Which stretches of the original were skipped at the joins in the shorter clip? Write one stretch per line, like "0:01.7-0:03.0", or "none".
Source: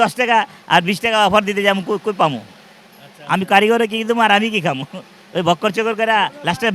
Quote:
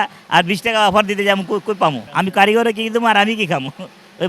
0:02.4-0:03.2